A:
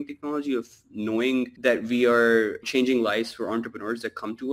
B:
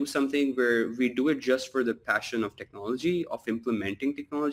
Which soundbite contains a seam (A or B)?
A